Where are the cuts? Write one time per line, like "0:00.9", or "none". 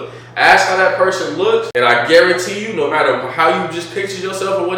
0:01.7

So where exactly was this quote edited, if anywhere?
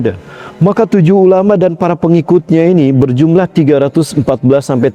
none

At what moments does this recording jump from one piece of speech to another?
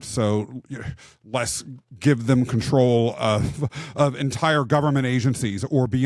none

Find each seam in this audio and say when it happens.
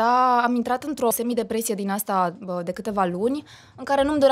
0:01.1

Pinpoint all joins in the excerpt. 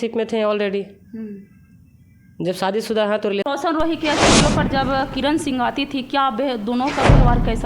0:03.4

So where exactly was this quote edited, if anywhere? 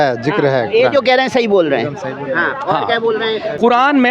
none

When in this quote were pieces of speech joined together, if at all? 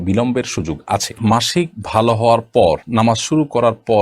0:01.2

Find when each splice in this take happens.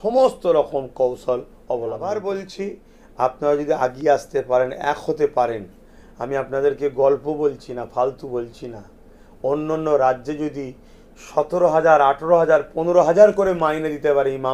0:02.0

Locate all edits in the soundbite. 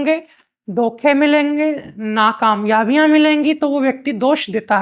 none

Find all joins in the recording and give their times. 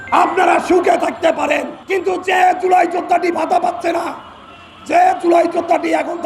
0:01.8

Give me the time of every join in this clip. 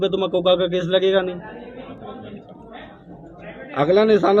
0:01.9

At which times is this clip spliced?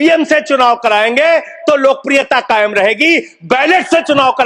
none

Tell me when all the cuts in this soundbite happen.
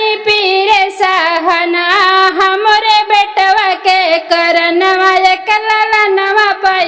none

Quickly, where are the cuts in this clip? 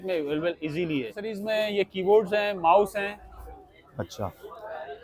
0:01.2

